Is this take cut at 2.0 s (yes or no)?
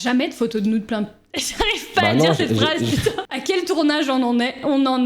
no